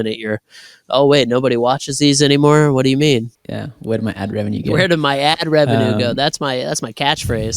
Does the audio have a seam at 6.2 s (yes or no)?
no